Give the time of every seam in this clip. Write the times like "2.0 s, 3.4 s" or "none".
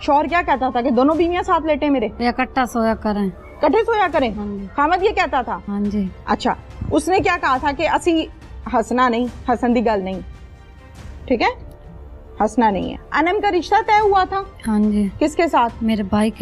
2.1 s, 5.6 s, 13.0 s